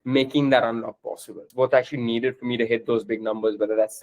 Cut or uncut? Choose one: cut